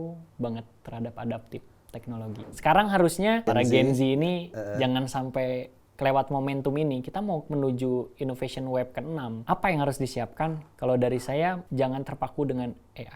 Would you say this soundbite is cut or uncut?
cut